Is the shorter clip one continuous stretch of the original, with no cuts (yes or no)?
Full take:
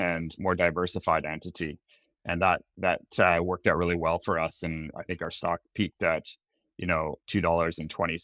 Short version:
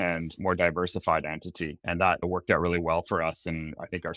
no